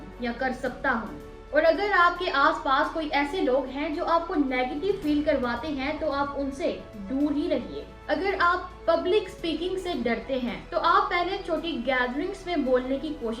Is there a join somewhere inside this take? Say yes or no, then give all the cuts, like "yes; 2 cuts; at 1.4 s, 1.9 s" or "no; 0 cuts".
yes; 1 cut; at 7.9 s